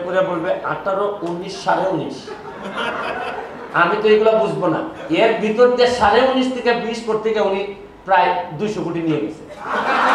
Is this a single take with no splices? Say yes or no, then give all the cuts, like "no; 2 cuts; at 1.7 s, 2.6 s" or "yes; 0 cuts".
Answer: yes; 0 cuts